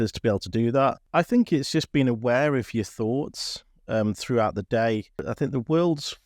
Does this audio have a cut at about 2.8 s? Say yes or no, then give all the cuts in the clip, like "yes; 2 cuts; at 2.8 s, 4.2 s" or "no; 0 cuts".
no; 2 cuts; at 1.0 s, 5.2 s